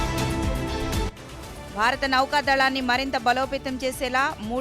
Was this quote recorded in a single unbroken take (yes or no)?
yes